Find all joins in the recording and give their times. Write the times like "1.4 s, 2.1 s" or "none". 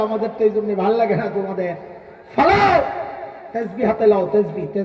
none